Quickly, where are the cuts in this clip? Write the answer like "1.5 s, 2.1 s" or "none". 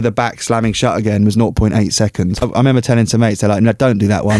2.5 s